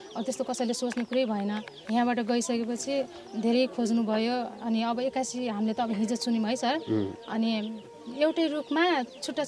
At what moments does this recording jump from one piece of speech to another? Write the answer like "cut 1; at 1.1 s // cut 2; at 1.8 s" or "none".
cut 1; at 1.7 s // cut 2; at 8.0 s